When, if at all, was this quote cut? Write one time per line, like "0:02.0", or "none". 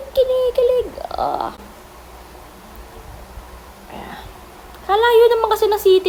none